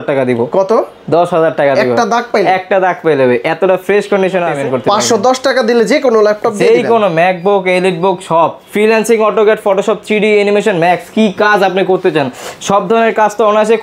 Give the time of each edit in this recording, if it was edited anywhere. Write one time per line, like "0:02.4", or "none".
0:04.5
0:08.6